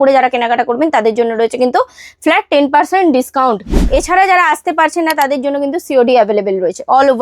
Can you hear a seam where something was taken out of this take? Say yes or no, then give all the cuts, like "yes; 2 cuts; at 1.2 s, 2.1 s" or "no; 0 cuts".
yes; 1 cut; at 3.8 s